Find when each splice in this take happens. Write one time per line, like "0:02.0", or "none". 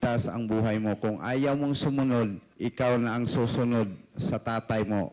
0:02.5